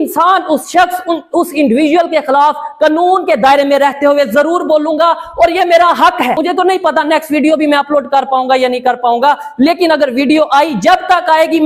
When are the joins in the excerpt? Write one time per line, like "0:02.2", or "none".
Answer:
0:06.4